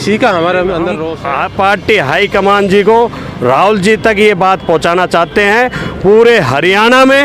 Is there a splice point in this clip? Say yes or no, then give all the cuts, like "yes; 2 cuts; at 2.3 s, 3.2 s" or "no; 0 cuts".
yes; 1 cut; at 1.1 s